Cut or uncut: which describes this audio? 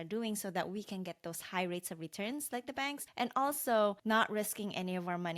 cut